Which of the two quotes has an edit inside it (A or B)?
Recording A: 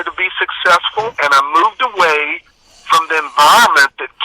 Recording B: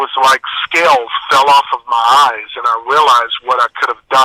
A